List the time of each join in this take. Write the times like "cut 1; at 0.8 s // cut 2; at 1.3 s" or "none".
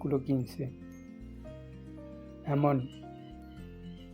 cut 1; at 3.2 s